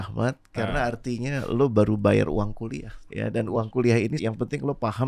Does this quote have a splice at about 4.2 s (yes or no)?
yes